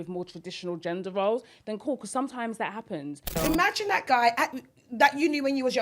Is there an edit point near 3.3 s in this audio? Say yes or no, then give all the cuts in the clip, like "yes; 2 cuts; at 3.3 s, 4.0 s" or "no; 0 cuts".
yes; 1 cut; at 3.3 s